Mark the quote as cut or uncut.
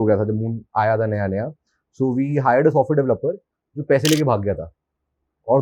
uncut